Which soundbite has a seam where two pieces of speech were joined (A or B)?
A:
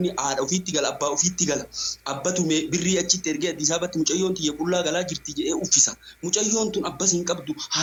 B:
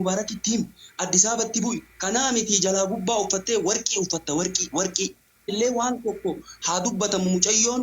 B